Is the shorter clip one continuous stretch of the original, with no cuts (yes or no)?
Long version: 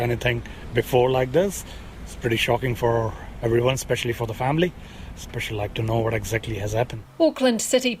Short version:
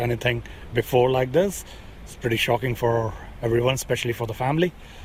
yes